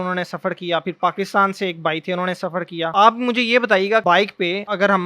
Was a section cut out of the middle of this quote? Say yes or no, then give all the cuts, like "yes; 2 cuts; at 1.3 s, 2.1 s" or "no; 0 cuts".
yes; 2 cuts; at 2.9 s, 4.1 s